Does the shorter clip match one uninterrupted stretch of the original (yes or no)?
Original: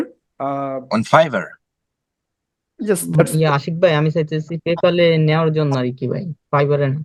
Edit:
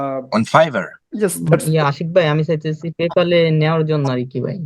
no